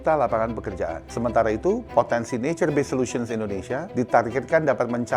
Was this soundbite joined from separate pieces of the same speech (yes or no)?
yes